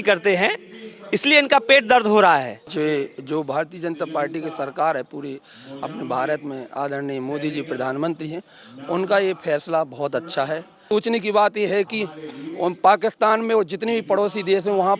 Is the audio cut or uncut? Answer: cut